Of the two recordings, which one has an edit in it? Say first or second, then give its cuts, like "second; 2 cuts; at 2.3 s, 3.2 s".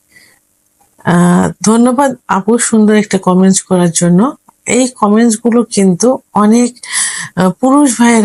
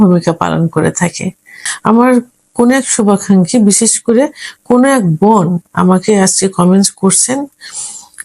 second; 1 cut; at 1.6 s